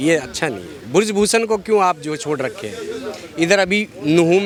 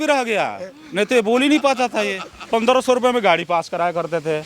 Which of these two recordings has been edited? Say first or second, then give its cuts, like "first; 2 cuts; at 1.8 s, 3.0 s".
second; 1 cut; at 2.3 s